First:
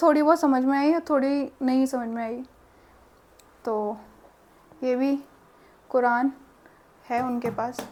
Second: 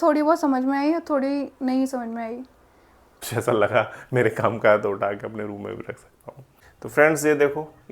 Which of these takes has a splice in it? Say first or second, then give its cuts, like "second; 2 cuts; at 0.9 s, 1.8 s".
second; 2 cuts; at 3.2 s, 6.8 s